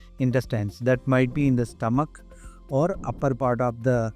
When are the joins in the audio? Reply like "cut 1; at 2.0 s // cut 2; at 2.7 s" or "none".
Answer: none